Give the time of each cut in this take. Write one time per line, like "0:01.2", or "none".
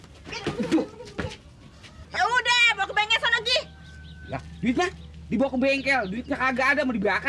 0:02.1